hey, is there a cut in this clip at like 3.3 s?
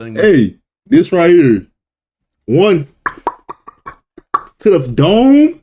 no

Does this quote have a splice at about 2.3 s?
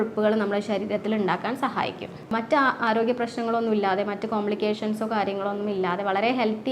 yes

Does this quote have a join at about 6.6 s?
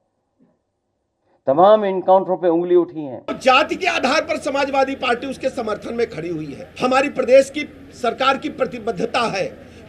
yes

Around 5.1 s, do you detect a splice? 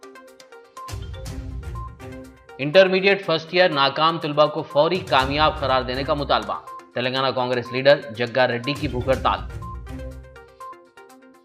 no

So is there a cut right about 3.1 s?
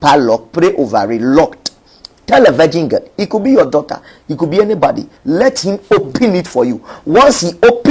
no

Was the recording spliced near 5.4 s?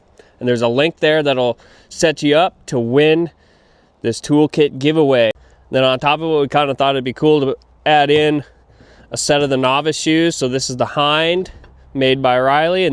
yes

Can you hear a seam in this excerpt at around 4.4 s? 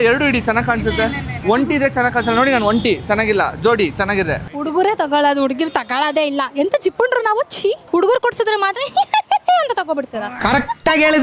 yes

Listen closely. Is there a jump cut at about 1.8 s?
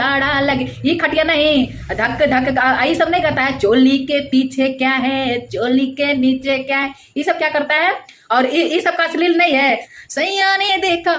no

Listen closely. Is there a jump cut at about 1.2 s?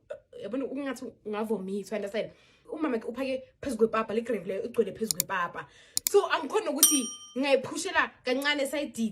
no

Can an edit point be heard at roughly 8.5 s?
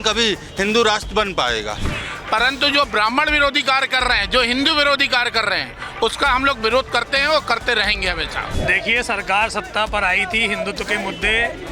yes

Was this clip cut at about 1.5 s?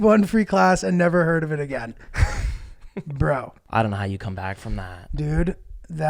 no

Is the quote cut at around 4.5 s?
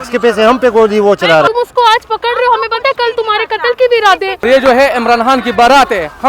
yes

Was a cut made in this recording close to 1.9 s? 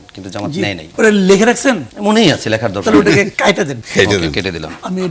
yes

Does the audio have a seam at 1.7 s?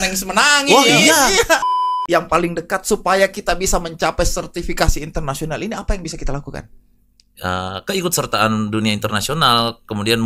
yes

